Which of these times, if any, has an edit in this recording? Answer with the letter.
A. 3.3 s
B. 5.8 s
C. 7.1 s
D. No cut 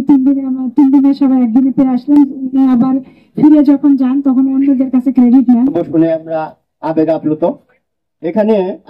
B